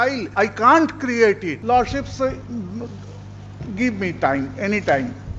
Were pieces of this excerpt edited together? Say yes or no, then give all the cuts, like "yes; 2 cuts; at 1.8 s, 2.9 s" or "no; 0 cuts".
yes; 1 cut; at 1.6 s